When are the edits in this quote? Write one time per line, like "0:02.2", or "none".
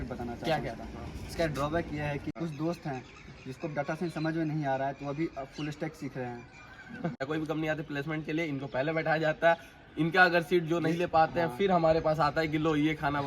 0:02.4
0:07.2